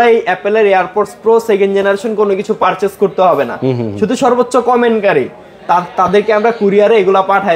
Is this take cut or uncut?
uncut